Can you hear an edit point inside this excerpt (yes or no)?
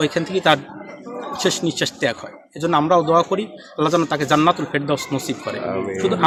no